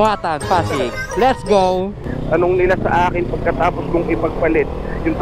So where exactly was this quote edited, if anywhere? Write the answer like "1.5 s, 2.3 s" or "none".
2.1 s

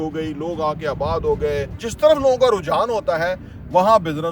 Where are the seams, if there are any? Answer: 1.8 s

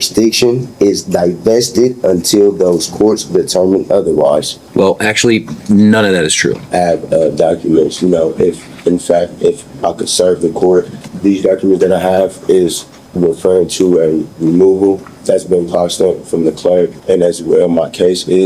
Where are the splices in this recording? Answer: 4.6 s, 6.6 s, 11.0 s, 15.1 s, 17.0 s

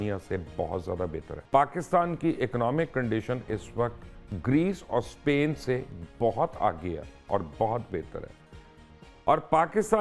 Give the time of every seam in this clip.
1.3 s

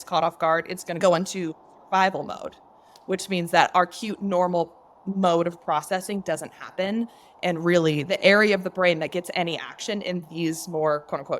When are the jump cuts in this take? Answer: 1.0 s

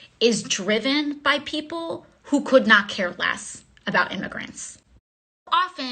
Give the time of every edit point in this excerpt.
4.7 s

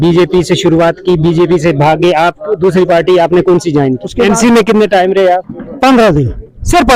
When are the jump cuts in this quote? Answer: 4.1 s, 5.6 s

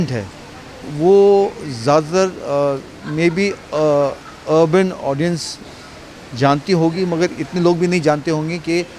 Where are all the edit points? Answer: none

